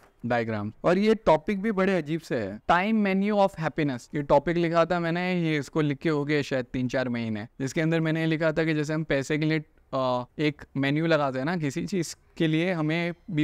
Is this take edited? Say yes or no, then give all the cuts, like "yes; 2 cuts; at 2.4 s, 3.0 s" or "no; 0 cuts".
no; 0 cuts